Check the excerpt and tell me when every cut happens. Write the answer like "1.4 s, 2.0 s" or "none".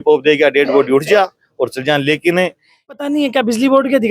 3.0 s

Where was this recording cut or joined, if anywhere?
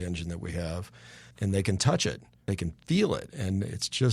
1.3 s, 2.3 s

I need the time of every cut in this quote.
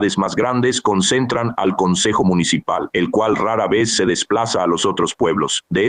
none

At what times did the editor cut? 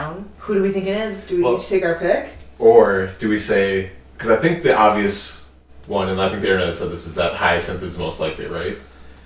none

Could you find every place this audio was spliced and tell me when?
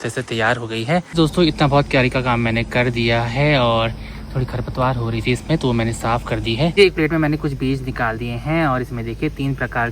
1.1 s, 6.7 s

